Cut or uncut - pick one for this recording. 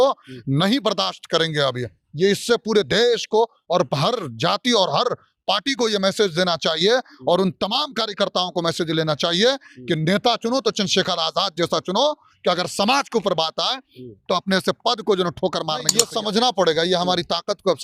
cut